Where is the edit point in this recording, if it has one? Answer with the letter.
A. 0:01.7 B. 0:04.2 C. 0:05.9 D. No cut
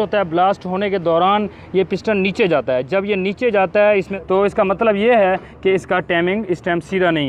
B